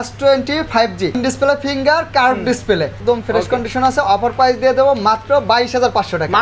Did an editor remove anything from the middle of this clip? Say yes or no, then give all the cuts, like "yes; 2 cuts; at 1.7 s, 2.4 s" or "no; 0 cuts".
yes; 2 cuts; at 1.2 s, 3.0 s